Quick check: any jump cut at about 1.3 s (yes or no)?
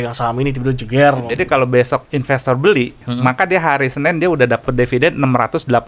yes